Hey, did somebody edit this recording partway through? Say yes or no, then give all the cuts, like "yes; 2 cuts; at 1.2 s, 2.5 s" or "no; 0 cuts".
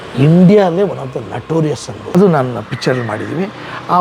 yes; 1 cut; at 2.1 s